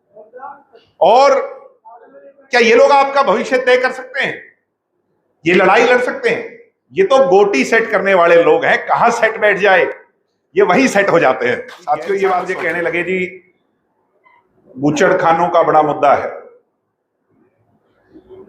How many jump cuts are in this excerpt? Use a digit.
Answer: 1